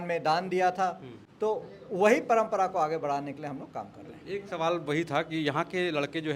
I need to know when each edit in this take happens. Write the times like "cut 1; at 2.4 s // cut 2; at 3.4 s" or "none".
none